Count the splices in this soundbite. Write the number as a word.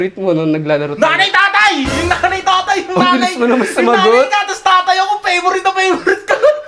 zero